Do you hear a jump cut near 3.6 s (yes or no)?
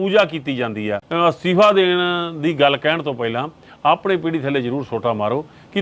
no